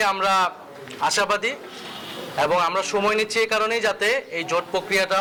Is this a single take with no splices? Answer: yes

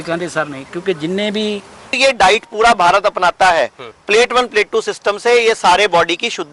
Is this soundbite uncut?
no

